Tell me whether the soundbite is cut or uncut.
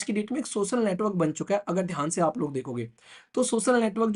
uncut